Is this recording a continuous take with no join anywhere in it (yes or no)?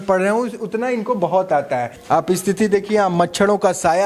no